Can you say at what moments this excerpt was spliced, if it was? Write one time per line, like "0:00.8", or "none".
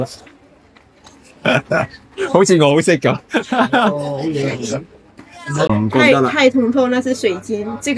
0:05.7